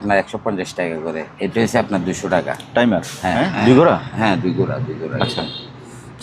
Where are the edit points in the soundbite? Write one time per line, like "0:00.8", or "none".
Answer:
0:01.3
0:03.3